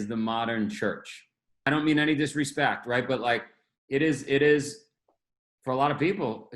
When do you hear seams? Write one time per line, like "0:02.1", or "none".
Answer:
0:01.5